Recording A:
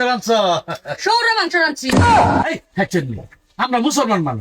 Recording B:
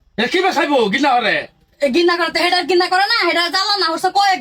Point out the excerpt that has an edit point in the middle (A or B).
A